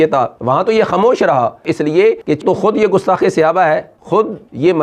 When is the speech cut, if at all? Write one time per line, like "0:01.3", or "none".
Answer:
0:03.9